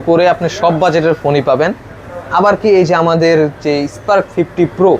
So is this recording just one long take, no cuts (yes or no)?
yes